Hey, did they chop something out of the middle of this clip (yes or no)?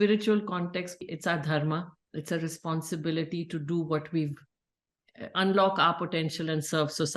yes